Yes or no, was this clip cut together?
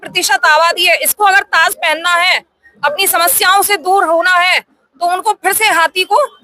no